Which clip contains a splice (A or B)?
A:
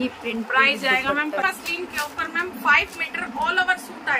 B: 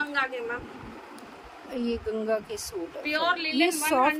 A